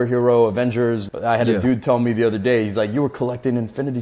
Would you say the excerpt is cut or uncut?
cut